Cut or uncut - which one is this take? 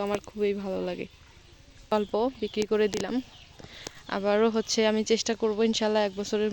cut